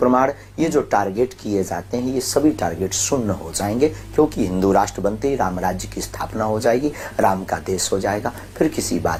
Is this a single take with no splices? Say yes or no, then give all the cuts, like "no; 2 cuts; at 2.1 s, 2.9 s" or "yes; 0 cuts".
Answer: yes; 0 cuts